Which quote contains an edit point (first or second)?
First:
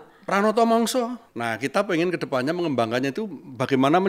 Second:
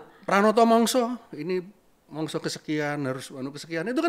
first